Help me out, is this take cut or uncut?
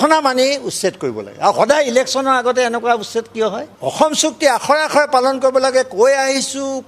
cut